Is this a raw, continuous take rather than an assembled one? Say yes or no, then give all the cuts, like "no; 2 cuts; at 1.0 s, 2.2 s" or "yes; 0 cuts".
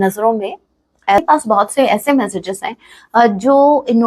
no; 1 cut; at 1.2 s